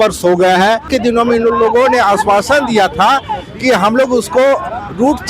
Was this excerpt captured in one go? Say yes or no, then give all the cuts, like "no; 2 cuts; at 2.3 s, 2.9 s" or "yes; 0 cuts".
no; 1 cut; at 0.9 s